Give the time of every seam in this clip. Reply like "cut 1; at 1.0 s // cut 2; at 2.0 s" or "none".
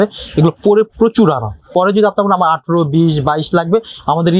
cut 1; at 1.7 s

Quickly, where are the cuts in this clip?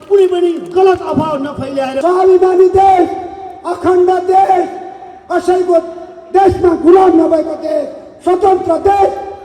cut 1; at 1.9 s

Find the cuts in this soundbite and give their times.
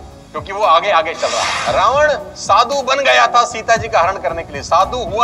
cut 1; at 1.5 s

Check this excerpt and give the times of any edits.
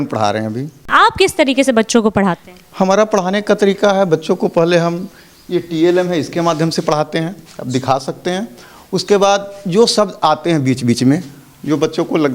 none

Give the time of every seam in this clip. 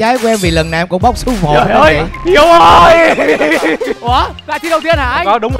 none

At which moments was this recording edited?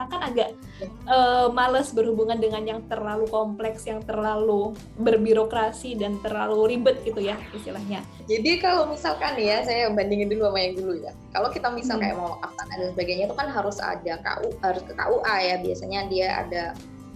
cut 1; at 8.1 s

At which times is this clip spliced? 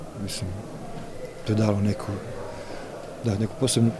none

